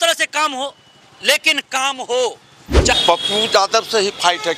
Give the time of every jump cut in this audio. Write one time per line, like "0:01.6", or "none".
0:02.9